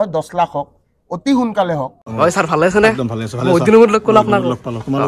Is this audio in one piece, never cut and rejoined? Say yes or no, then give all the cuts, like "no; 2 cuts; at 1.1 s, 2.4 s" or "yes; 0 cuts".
no; 1 cut; at 2.1 s